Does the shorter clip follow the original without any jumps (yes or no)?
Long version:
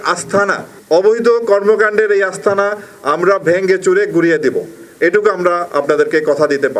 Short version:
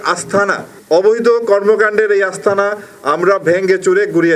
yes